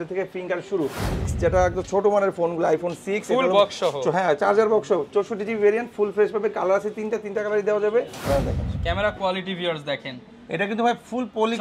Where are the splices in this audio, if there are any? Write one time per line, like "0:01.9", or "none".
0:01.1
0:08.3